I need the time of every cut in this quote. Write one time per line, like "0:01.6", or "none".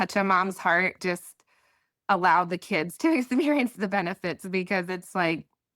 0:01.0